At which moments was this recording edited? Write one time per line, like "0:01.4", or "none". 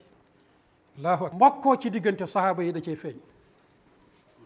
0:01.3